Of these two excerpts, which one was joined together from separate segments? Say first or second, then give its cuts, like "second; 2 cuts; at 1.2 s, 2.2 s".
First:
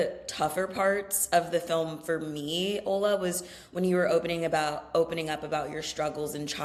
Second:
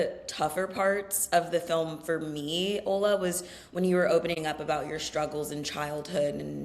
second; 1 cut; at 4.3 s